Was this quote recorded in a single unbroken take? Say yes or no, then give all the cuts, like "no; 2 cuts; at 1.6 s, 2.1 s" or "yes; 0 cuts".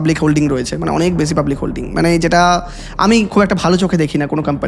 yes; 0 cuts